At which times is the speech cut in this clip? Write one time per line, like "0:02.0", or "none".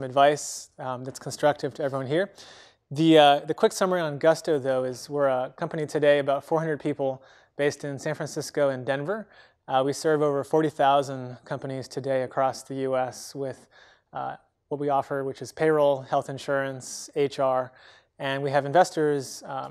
0:11.9